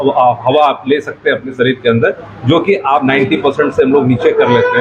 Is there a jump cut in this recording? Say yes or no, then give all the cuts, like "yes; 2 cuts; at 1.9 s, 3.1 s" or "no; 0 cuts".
yes; 1 cut; at 3.0 s